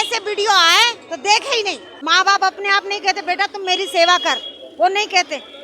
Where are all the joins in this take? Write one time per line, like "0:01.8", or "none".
0:01.9